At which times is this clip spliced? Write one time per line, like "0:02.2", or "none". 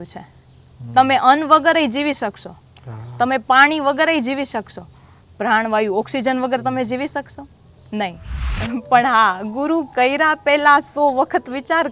0:08.6

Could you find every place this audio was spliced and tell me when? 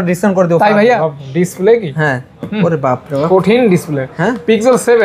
0:01.0

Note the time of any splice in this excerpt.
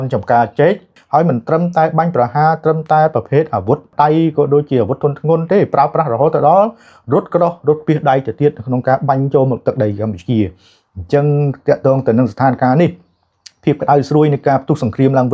0:00.9
0:03.9

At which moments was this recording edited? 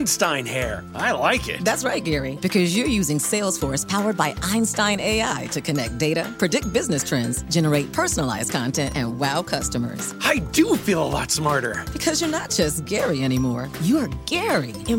none

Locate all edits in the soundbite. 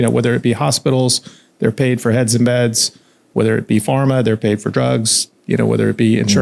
none

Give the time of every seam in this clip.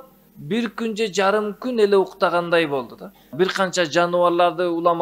0:03.3

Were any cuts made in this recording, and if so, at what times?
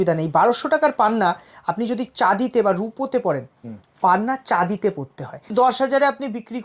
0:05.5

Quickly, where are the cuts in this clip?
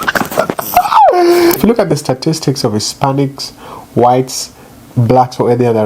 0:01.6

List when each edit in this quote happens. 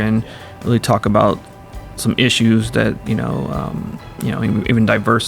none

